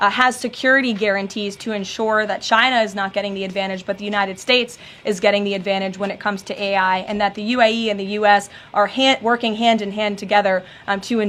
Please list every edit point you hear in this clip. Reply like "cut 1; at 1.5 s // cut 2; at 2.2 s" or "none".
none